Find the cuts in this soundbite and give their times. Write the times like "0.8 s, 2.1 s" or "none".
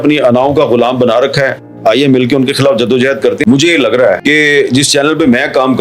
3.4 s